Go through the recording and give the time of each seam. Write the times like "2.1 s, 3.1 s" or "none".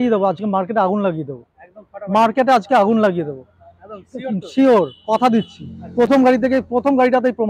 none